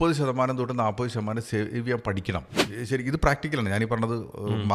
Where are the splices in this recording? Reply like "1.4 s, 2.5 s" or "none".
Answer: 2.6 s